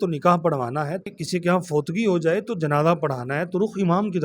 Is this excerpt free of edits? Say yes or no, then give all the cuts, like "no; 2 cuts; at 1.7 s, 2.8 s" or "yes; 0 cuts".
no; 1 cut; at 1.1 s